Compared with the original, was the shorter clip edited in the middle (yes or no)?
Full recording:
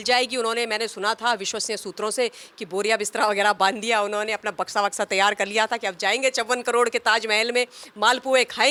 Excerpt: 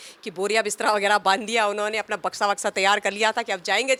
no